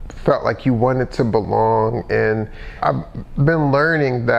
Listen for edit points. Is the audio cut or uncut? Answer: cut